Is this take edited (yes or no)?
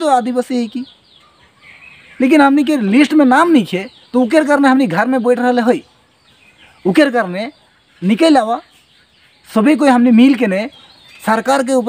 no